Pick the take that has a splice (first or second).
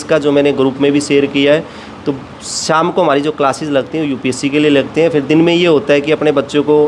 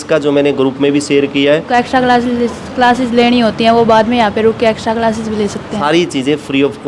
second